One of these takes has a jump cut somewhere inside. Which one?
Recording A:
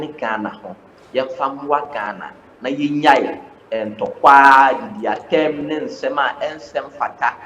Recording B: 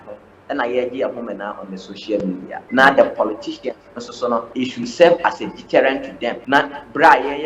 B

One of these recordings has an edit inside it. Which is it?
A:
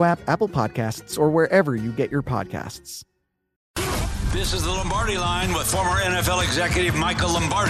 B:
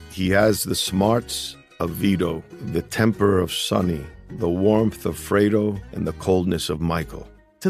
A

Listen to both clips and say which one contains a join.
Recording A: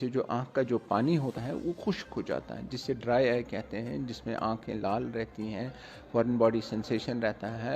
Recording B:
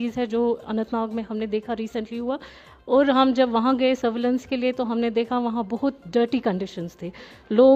A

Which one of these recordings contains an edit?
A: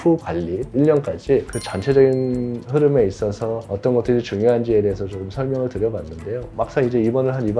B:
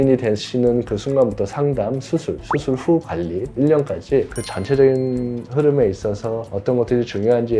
A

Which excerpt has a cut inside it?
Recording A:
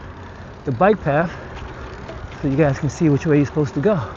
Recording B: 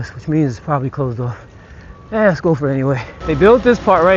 B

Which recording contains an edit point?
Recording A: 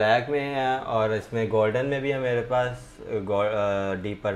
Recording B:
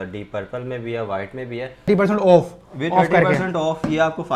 B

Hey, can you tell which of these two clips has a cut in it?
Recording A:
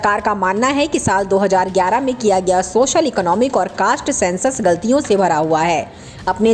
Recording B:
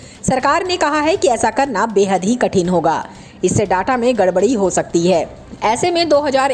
B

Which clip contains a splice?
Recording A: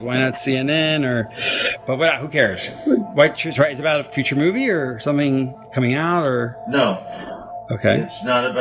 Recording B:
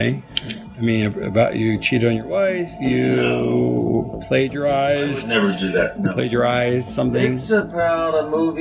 B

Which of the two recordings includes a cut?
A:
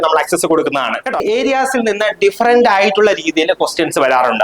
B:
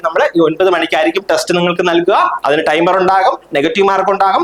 A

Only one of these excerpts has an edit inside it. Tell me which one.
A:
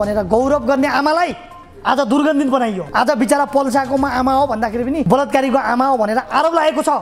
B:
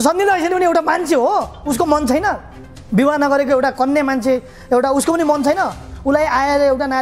A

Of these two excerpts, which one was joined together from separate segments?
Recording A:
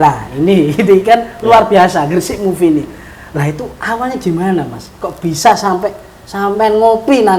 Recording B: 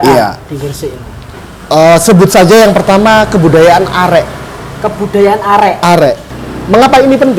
B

